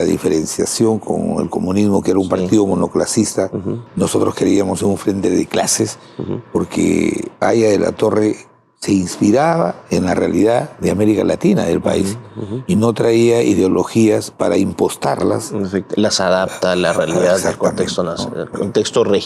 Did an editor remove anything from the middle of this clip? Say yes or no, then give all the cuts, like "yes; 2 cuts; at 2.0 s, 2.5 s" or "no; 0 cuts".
no; 0 cuts